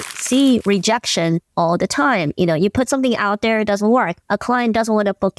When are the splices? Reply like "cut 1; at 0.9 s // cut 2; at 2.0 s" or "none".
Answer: none